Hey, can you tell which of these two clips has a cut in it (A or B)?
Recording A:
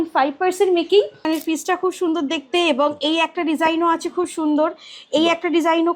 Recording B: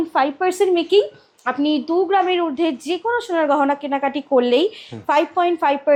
A